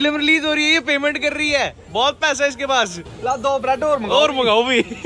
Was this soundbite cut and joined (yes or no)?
yes